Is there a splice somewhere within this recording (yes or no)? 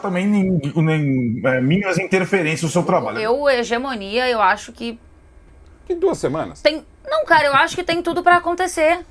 yes